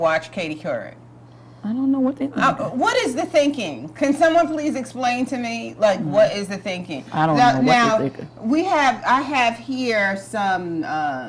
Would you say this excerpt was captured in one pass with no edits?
no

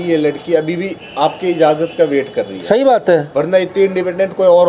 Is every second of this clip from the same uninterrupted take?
yes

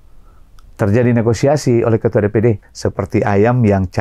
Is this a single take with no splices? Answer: no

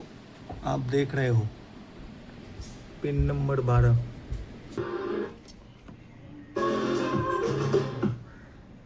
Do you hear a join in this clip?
yes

